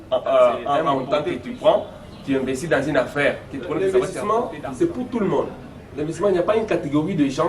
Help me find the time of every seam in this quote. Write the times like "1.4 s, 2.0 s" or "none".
0.9 s, 3.8 s